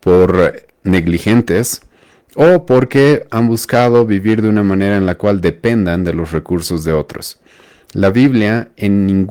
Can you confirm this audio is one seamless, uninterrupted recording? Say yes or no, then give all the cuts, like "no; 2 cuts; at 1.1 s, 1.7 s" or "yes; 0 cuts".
yes; 0 cuts